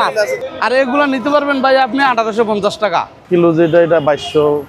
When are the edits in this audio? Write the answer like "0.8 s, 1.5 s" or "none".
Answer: 3.1 s